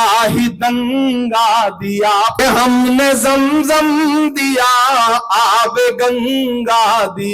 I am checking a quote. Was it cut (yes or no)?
yes